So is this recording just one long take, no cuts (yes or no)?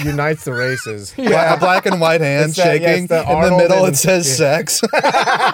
no